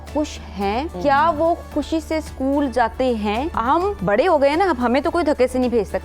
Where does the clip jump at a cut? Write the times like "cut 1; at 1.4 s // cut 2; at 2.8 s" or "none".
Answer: cut 1; at 0.9 s // cut 2; at 3.7 s